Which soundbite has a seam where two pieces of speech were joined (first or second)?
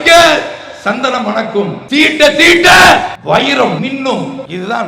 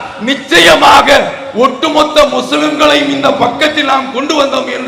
first